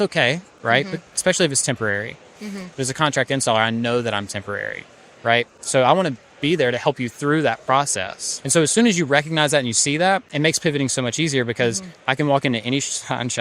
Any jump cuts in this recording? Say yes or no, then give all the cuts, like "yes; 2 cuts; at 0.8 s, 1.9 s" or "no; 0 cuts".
yes; 2 cuts; at 8.4 s, 11.9 s